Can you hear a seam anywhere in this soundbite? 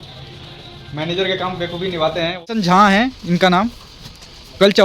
yes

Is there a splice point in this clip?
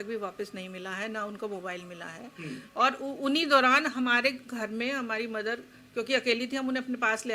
no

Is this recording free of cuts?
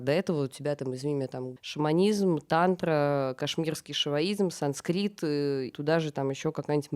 no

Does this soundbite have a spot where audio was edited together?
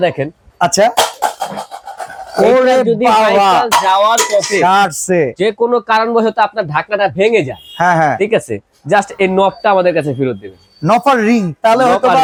no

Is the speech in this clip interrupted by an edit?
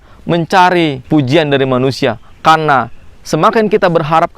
yes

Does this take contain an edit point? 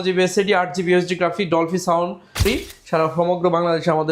yes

